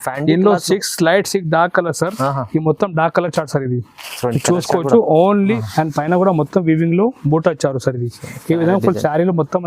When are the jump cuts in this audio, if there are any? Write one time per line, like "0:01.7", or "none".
0:05.6